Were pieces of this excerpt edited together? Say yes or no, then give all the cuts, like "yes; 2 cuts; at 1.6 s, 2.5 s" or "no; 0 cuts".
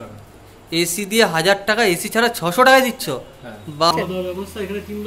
yes; 1 cut; at 3.9 s